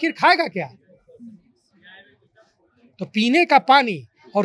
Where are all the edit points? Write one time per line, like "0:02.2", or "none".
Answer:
none